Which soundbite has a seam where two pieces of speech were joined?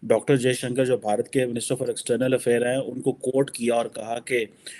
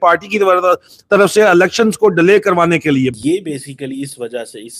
second; 1 cut; at 3.2 s

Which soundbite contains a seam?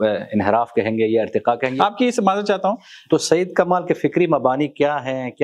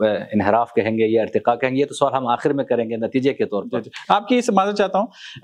first; 2 cuts; at 1.7 s, 2.9 s

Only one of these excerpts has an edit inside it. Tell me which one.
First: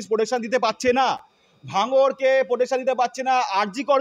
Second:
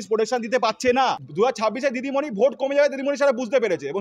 second; 1 cut; at 1.2 s

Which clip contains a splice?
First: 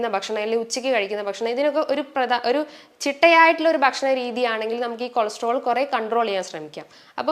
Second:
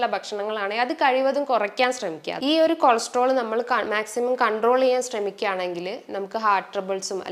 second; 1 cut; at 2.3 s

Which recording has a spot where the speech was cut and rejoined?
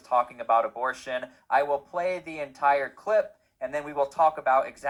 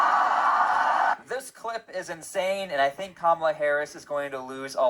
second; 1 cut; at 1.1 s

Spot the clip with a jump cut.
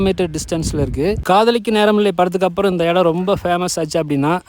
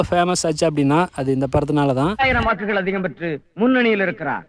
first; 1 cut; at 1.2 s

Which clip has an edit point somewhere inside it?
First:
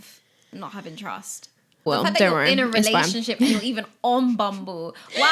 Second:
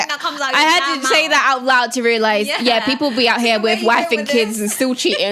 first; 1 cut; at 1.9 s

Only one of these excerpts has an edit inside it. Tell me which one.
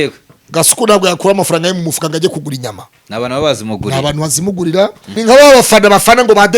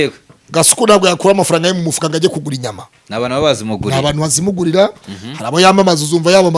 first; 1 cut; at 5.1 s

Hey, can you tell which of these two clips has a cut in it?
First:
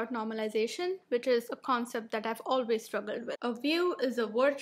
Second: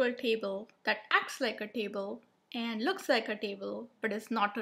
first; 1 cut; at 3.3 s

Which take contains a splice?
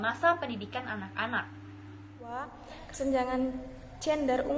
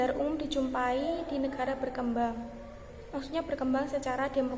first; 1 cut; at 2.5 s

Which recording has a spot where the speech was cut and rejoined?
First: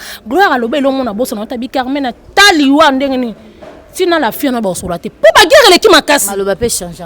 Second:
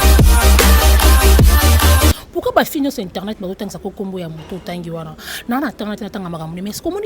second; 1 cut; at 2.2 s

